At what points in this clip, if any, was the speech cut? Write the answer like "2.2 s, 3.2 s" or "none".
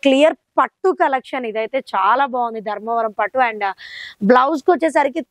none